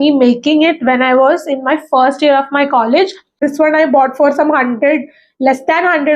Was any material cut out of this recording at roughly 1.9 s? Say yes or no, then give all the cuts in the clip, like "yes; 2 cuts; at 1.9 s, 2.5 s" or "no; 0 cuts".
no; 1 cut; at 3.4 s